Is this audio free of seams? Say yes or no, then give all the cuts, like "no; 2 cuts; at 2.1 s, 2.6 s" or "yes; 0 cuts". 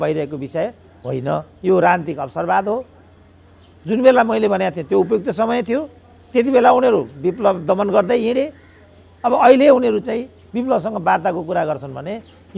yes; 0 cuts